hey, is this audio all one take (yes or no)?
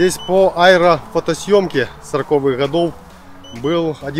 yes